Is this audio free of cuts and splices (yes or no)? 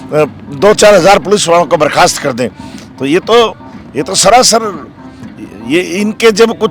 yes